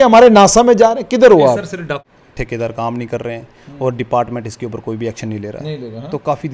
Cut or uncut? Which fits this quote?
cut